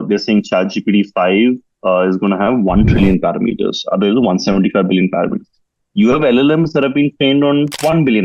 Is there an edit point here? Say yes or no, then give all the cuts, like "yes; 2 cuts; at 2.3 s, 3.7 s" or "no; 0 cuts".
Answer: no; 0 cuts